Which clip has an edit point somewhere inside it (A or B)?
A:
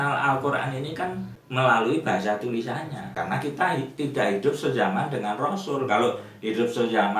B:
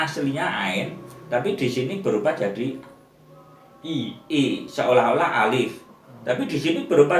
A